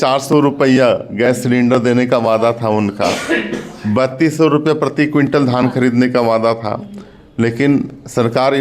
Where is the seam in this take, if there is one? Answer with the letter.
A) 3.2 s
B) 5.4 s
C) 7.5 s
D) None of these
D